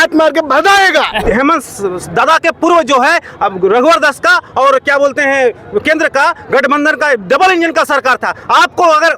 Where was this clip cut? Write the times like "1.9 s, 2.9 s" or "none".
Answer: 1.2 s